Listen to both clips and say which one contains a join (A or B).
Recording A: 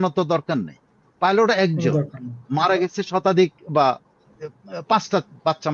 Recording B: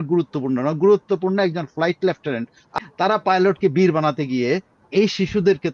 B